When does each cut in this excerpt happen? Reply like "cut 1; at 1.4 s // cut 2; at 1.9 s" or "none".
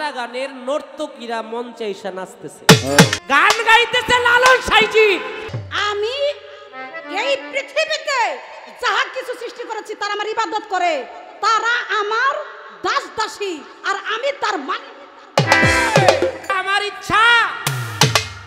cut 1; at 3.2 s // cut 2; at 5.6 s // cut 3; at 16.4 s

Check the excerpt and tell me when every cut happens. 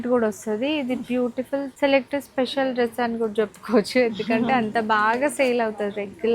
cut 1; at 1.7 s

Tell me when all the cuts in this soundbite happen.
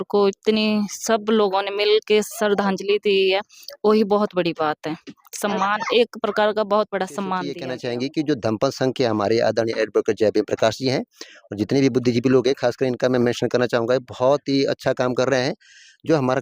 cut 1; at 7.7 s

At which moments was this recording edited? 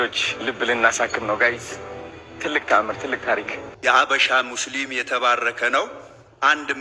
cut 1; at 3.6 s

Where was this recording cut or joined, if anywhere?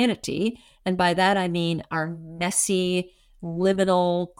none

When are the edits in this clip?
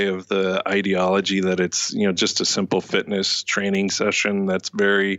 none

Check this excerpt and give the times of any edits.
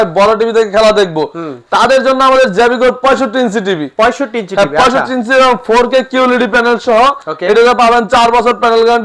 none

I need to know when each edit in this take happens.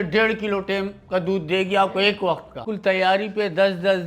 cut 1; at 2.7 s

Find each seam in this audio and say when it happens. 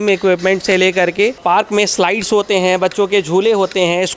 cut 1; at 1.4 s

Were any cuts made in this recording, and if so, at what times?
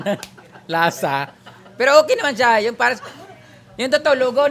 none

